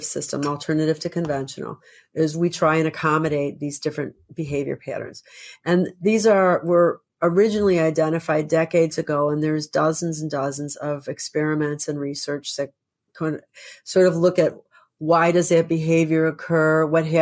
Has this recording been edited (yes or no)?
no